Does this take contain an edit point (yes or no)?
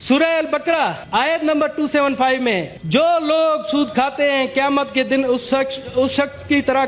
yes